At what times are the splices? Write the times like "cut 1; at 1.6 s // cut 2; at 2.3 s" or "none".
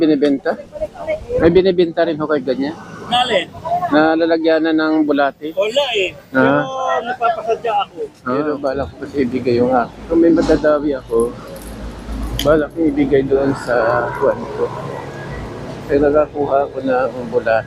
cut 1; at 8.4 s